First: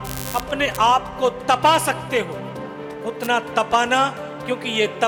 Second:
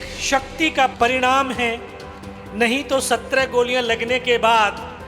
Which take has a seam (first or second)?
second